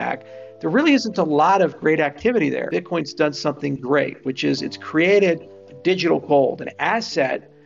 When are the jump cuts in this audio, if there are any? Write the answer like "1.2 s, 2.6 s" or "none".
2.7 s